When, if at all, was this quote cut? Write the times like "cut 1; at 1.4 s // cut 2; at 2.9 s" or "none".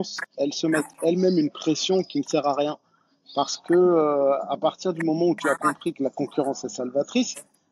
none